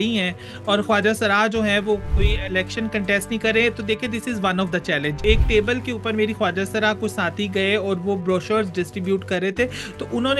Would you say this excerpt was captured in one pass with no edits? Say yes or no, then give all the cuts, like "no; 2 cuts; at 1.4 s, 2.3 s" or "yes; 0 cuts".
no; 2 cuts; at 2.1 s, 5.2 s